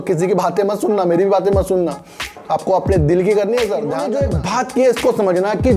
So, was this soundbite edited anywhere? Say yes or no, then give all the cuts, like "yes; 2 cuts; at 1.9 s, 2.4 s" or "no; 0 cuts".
yes; 1 cut; at 4.1 s